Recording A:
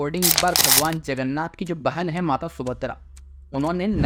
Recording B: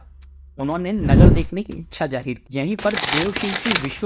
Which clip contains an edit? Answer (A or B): B